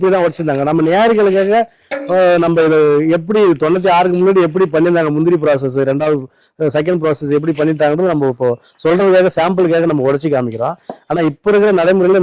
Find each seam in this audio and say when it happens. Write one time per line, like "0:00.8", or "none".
none